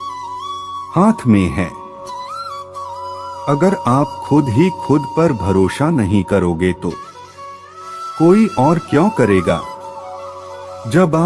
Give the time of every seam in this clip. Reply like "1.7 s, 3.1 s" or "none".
1.7 s, 3.2 s